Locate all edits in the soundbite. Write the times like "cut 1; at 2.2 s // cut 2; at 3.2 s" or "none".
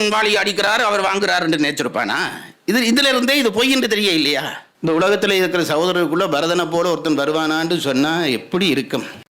cut 1; at 4.6 s